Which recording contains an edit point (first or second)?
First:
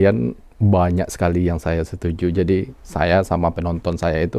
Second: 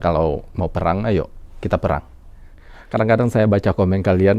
second